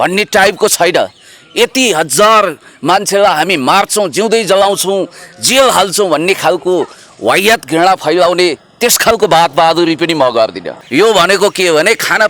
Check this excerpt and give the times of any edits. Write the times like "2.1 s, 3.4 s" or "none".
10.8 s